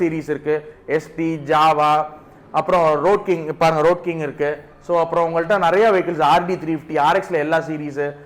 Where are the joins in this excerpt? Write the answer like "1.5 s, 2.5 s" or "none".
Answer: none